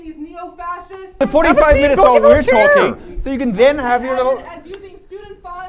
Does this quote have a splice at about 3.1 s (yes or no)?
no